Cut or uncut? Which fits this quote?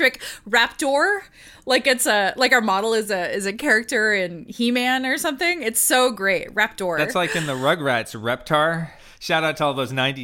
cut